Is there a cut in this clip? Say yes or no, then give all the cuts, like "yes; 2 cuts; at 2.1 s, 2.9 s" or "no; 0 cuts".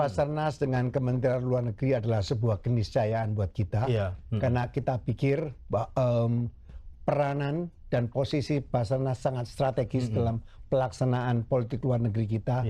no; 0 cuts